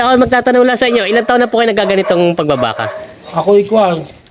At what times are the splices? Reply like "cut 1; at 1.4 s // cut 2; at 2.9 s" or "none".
none